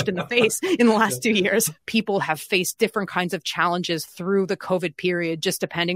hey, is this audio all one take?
no; 1 cut; at 1.7 s

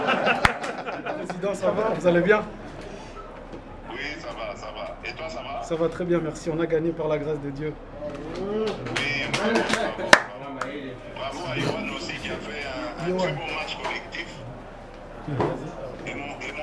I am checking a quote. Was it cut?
no; 0 cuts

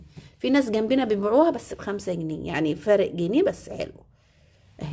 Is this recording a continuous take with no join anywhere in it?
yes; 0 cuts

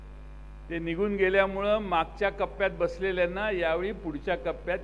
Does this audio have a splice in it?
no; 0 cuts

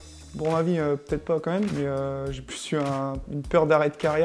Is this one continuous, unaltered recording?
yes; 0 cuts

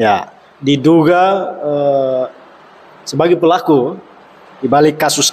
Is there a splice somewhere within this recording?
no; 0 cuts

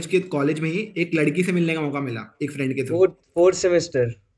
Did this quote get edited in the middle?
no; 0 cuts

